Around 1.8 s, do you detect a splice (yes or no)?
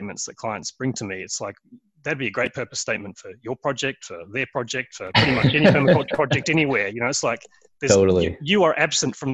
no